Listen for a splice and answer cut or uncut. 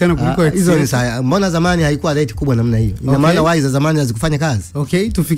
uncut